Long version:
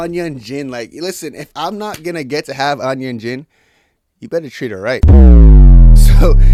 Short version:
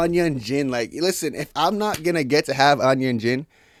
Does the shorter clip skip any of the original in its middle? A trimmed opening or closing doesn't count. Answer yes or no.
no